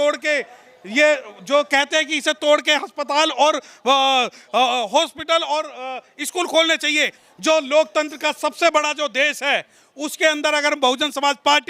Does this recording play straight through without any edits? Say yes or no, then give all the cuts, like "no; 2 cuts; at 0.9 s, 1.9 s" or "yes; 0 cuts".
no; 1 cut; at 7.2 s